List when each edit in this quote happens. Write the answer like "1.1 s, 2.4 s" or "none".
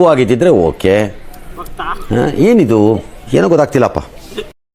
none